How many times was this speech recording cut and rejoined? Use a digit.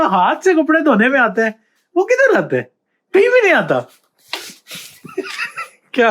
0